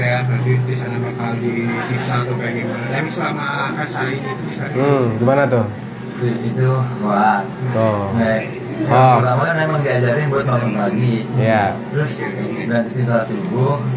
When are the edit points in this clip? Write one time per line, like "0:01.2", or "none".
none